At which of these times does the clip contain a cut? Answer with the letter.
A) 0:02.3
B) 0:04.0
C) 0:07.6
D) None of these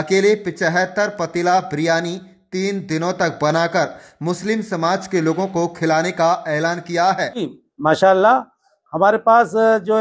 C